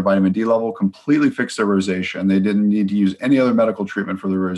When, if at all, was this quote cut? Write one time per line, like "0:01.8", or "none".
none